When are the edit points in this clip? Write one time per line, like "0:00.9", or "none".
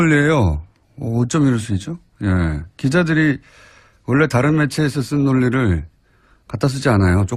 0:04.2